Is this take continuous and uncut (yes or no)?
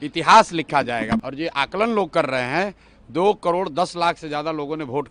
no